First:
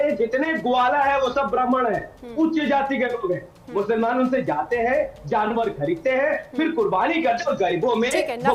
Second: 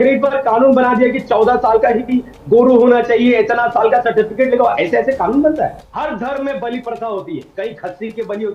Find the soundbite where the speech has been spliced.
second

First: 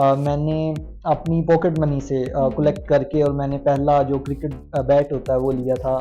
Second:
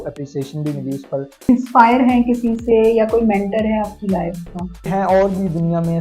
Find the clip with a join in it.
second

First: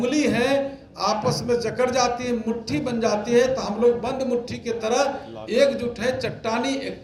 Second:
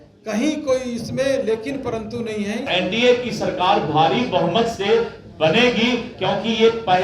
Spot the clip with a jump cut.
second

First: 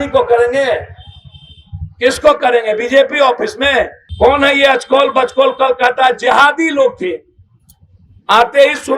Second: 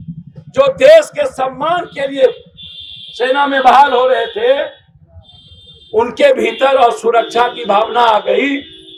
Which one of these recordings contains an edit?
first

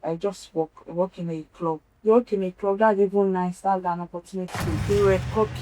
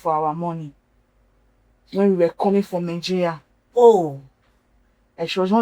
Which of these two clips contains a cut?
first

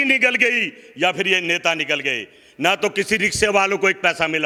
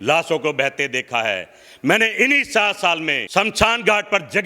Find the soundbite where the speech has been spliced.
second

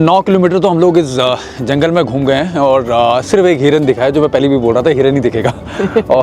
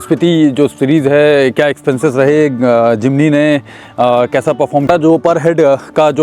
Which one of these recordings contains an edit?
second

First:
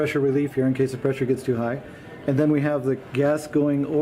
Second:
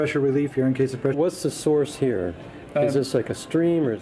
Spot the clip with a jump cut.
first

